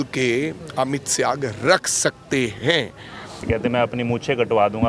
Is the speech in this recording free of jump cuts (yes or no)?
no